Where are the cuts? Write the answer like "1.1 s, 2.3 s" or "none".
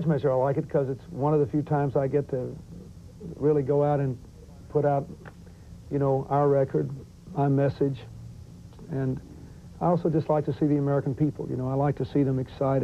1.9 s

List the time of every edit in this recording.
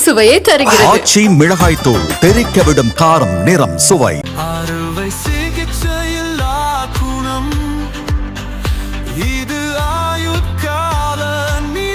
none

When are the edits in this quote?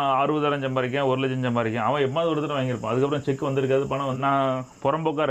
4.2 s

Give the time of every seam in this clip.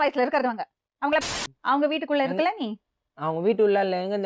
1.2 s

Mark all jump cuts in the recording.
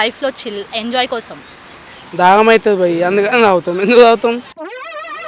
2.1 s, 4.3 s

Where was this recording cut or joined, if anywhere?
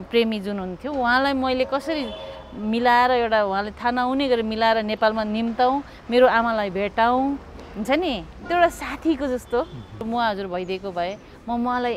10.0 s

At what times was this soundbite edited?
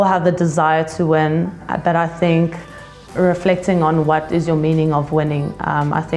1.6 s

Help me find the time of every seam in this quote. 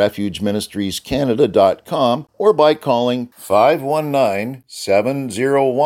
2.3 s

